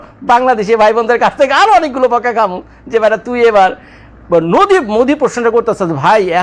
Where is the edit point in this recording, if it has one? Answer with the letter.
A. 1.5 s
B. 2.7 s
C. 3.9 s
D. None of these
D